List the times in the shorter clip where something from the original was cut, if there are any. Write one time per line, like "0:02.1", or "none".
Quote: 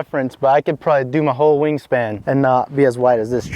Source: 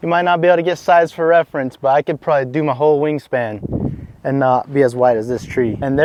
0:02.1

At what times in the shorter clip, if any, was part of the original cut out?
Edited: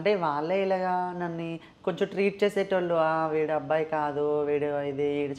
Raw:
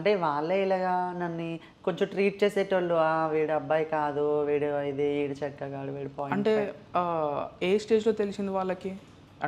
none

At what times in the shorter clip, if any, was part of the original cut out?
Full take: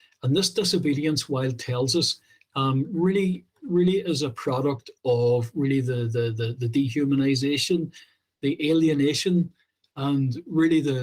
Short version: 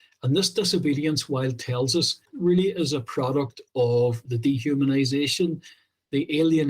0:02.2
0:04.2

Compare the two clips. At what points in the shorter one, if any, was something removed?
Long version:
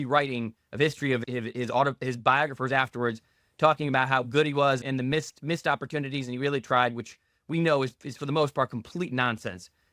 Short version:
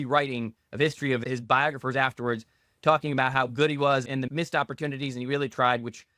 0:01.2
0:04.3

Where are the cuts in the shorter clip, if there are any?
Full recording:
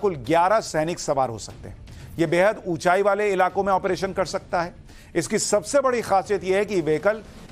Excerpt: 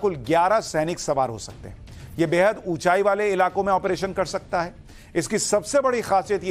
none

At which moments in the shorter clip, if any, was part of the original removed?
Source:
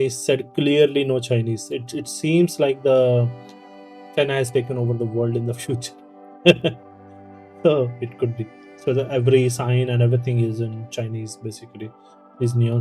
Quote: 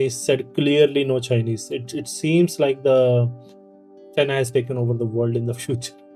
none

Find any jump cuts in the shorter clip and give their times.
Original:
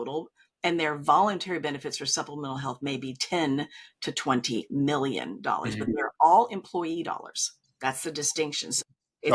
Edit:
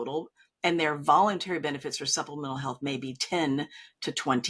none

